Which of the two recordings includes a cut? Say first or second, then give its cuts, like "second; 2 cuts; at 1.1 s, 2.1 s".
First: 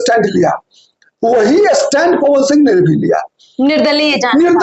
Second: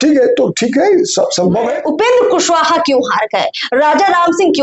second; 1 cut; at 1.7 s